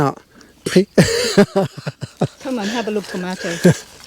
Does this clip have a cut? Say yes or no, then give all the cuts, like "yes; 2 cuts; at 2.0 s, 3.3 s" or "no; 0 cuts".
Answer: no; 0 cuts